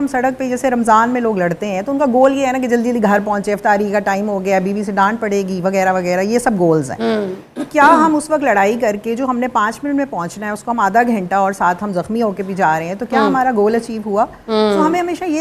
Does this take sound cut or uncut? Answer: uncut